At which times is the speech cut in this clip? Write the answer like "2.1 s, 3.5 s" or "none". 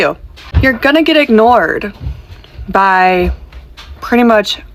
none